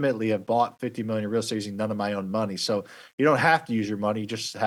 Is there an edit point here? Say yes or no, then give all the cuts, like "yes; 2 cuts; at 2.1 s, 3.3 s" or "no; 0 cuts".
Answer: no; 0 cuts